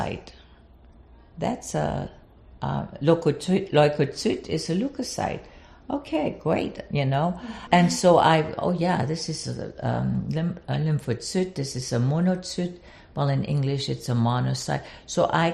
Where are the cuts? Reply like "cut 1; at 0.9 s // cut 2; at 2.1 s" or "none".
cut 1; at 7.5 s